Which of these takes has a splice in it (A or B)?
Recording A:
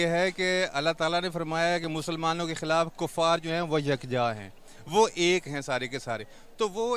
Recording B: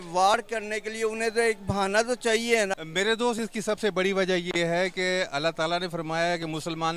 B